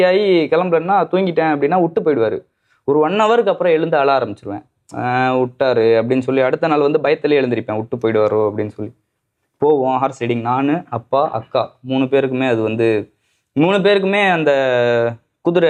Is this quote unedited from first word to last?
yes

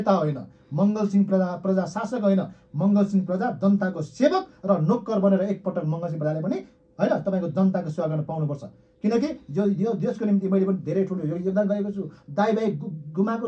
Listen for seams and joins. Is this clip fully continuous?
yes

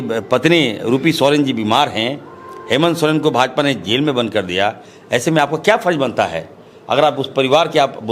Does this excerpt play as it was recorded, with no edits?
yes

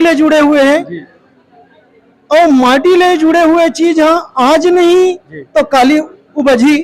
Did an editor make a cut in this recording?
no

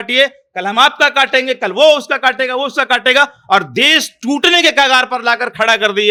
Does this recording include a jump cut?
no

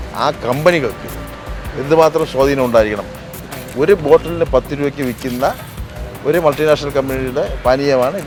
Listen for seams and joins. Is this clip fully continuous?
yes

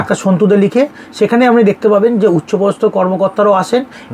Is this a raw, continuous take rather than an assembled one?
yes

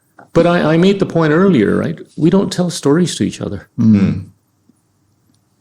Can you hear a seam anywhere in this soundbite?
no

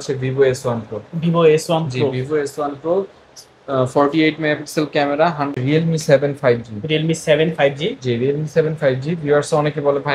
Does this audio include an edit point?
yes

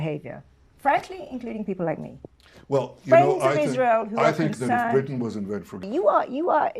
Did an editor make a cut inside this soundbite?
yes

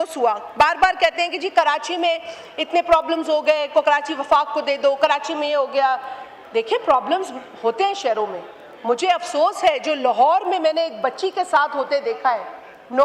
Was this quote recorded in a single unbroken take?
yes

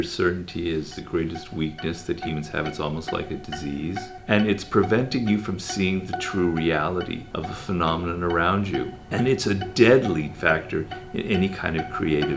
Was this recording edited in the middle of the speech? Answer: yes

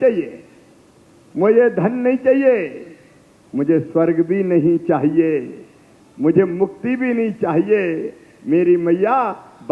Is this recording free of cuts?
yes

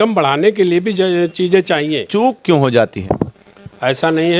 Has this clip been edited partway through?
yes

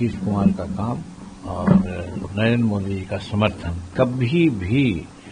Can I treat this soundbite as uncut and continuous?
no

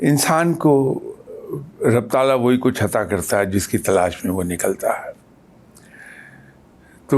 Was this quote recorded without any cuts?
yes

